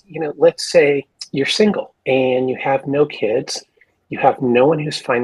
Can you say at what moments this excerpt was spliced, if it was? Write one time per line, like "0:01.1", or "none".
0:01.2
0:01.9